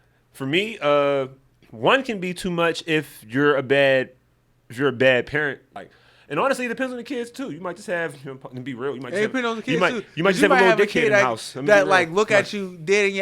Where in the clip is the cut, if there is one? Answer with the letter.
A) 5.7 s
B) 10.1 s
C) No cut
A